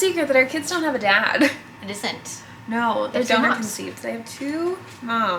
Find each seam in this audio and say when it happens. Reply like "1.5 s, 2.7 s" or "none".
none